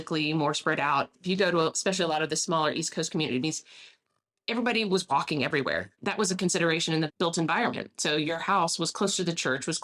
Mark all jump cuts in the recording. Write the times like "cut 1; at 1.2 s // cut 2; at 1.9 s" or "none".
cut 1; at 1.1 s // cut 2; at 5.9 s // cut 3; at 7.1 s